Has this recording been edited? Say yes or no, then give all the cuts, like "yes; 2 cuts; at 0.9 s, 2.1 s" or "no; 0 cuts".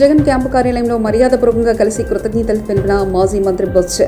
no; 0 cuts